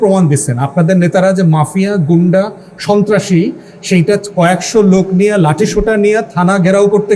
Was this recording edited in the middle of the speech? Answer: no; 0 cuts

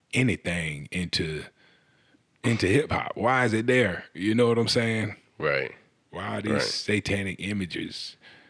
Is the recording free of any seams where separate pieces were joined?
yes; 0 cuts

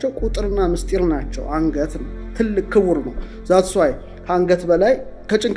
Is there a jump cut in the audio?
no; 0 cuts

